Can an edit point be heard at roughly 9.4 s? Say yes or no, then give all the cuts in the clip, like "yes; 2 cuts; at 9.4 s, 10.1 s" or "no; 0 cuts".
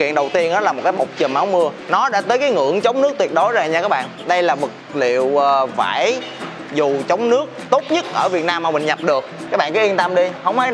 yes; 2 cuts; at 1.8 s, 9.4 s